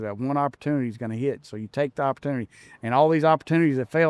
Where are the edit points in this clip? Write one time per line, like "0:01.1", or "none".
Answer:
none